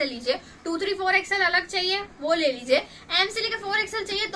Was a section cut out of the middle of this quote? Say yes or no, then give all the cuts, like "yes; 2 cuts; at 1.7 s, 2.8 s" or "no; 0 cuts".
no; 0 cuts